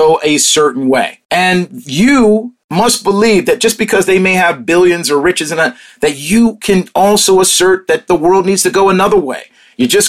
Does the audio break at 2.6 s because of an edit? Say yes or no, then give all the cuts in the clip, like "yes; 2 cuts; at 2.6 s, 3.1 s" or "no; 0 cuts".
yes; 2 cuts; at 1.2 s, 2.6 s